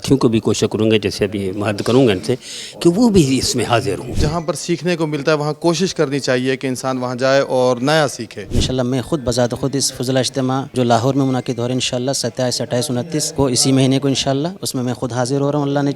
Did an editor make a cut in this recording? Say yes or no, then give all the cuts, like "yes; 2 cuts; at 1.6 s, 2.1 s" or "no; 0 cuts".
yes; 4 cuts; at 4.2 s, 8.6 s, 10.7 s, 13.3 s